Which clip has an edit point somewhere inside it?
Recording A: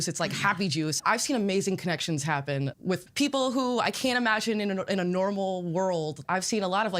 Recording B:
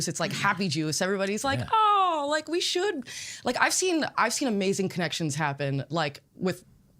A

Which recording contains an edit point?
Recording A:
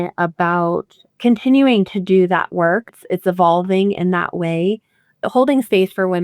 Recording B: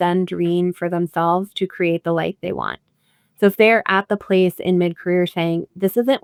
A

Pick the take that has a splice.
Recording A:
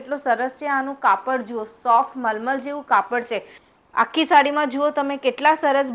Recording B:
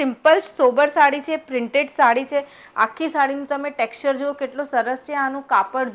A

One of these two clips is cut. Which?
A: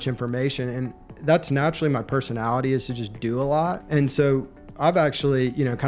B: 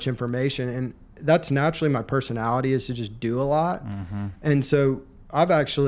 A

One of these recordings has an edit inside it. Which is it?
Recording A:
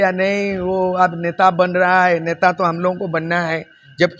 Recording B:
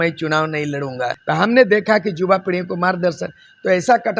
B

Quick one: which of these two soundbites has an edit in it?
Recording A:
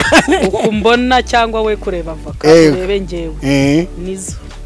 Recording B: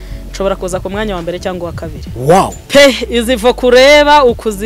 B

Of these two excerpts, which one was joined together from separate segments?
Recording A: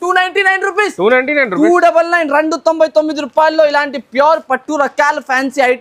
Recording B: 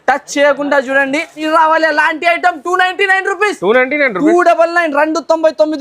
B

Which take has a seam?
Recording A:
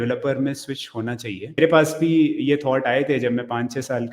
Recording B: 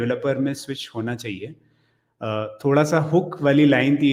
A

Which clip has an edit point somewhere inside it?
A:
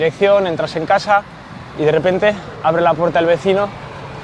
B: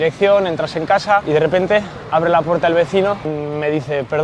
B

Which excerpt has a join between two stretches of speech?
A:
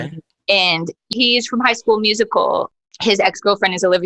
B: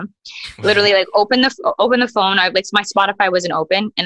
A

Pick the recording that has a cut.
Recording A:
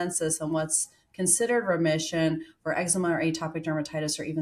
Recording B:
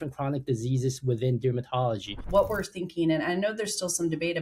B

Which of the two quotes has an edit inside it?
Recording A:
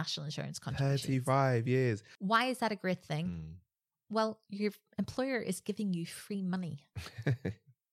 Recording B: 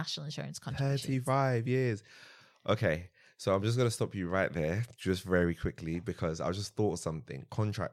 A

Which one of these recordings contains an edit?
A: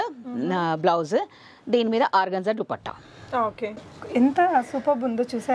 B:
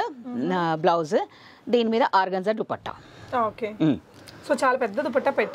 A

